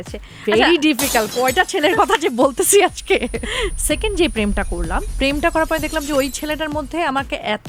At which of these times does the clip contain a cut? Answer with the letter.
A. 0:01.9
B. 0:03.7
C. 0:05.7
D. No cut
B